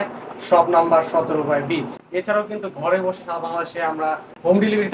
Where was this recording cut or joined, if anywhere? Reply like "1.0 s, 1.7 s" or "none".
none